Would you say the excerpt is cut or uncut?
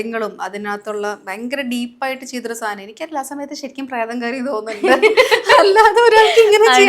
uncut